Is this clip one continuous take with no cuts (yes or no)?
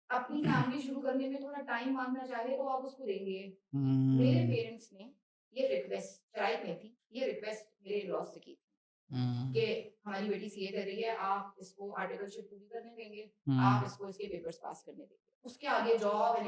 yes